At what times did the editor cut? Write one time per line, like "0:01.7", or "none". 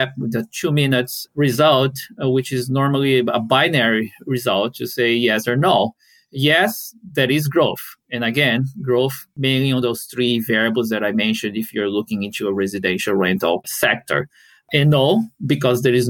0:13.7